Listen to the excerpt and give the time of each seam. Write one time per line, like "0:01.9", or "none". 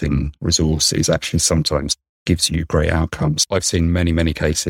0:03.4